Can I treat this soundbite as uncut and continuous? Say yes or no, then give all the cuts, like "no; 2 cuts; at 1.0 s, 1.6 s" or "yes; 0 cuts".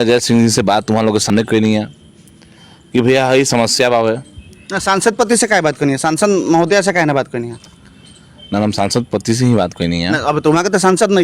no; 1 cut; at 1.3 s